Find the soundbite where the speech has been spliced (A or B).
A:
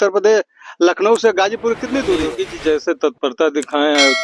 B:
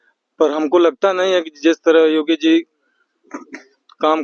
A